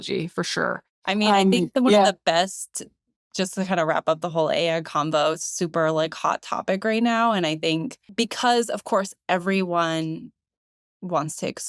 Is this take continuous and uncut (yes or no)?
yes